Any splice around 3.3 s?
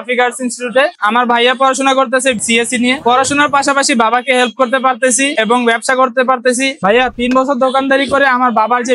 no; 2 cuts; at 0.9 s, 6.8 s

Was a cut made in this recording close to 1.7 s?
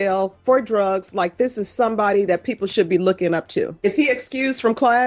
no; 1 cut; at 3.7 s

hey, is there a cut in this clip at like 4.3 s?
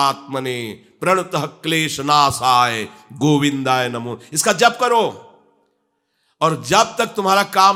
no; 0 cuts

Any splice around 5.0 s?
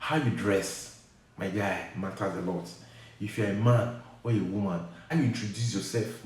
yes; 1 cut; at 5.0 s

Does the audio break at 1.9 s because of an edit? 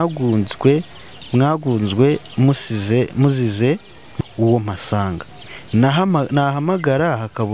no; 1 cut; at 4.1 s

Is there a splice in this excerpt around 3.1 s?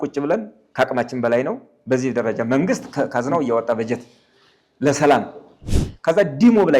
no; 1 cut; at 5.7 s

